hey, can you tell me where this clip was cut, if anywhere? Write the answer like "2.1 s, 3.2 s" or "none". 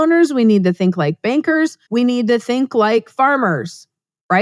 1.8 s

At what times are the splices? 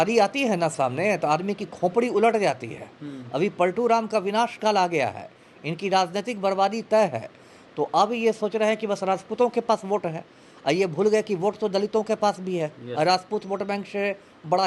none

